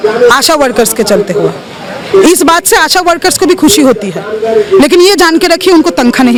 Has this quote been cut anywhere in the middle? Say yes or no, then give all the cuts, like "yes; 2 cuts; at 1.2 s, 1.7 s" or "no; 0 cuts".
no; 0 cuts